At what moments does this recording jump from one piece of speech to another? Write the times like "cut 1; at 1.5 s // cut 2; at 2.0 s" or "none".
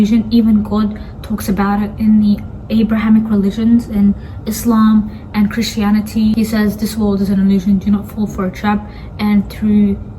cut 1; at 6.3 s

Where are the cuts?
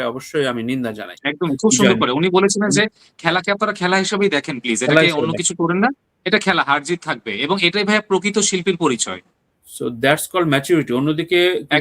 cut 1; at 1.2 s

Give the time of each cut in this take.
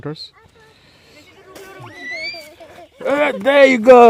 cut 1; at 1.3 s

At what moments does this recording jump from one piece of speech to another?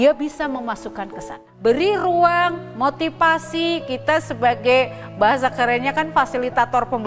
cut 1; at 1.4 s

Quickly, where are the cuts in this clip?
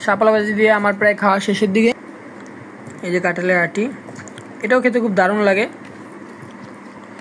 cut 1; at 1.9 s // cut 2; at 6.1 s

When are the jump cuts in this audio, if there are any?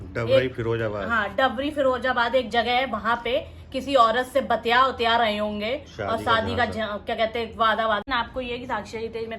cut 1; at 8.0 s

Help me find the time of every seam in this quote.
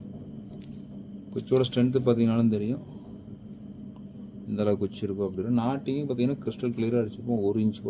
none

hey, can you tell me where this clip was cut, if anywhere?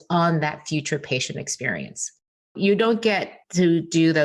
cut 1; at 2.5 s // cut 2; at 3.4 s

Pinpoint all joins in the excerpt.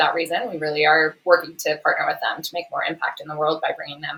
none

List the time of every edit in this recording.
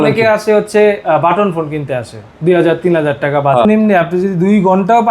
cut 1; at 3.6 s

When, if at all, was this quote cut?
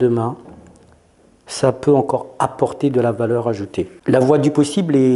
cut 1; at 3.9 s

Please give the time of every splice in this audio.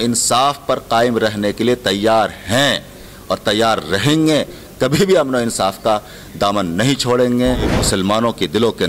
cut 1; at 7.7 s

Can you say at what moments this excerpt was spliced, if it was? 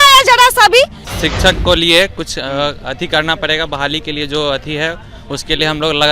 cut 1; at 1.0 s

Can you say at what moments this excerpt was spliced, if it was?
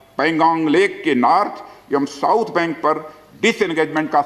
none

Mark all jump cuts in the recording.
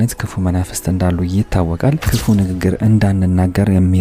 cut 1; at 2.1 s

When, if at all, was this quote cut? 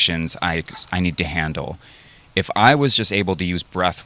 none

